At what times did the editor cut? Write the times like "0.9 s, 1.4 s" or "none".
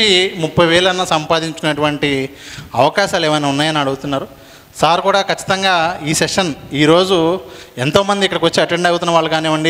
none